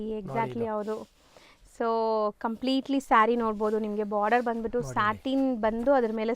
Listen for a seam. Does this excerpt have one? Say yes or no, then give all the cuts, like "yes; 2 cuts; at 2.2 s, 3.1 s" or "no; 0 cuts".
no; 0 cuts